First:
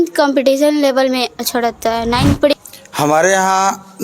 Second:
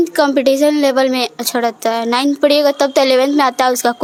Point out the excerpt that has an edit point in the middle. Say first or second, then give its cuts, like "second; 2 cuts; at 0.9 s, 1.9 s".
first; 1 cut; at 2.5 s